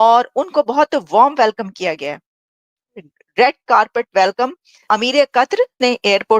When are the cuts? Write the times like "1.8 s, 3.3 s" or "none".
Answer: 4.8 s